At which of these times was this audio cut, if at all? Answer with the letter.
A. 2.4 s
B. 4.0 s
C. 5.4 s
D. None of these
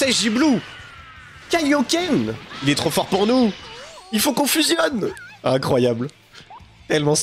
A